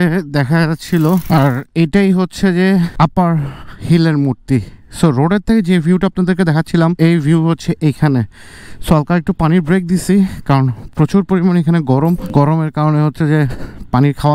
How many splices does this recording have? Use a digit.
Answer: 4